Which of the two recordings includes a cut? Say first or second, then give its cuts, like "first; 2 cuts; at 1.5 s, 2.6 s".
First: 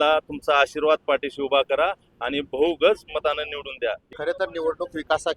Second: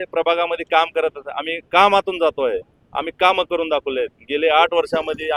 first; 1 cut; at 4.0 s